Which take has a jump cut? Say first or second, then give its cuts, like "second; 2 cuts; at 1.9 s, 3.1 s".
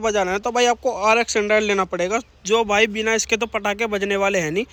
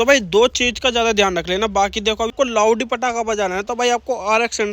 second; 1 cut; at 2.3 s